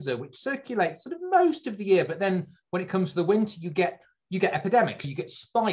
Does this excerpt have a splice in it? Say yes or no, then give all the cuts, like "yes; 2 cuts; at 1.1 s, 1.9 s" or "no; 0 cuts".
no; 0 cuts